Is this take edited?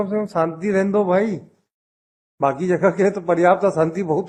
no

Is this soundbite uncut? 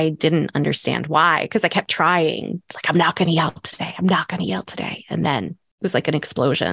no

